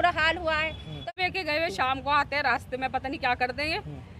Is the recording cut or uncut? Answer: cut